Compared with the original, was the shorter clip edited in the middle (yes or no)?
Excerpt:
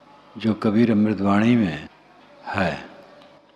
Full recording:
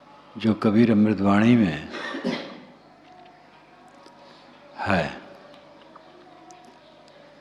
yes